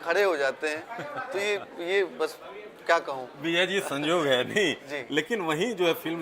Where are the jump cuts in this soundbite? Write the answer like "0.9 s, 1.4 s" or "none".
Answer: none